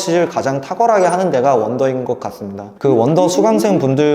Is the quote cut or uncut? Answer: cut